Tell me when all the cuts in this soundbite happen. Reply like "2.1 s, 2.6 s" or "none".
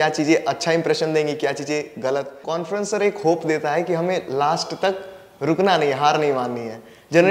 2.4 s